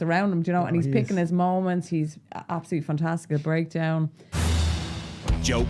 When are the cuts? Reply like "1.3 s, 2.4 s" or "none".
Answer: 4.3 s